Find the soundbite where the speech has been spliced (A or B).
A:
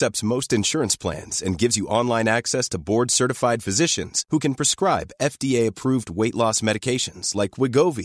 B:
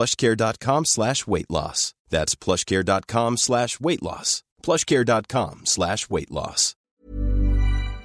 B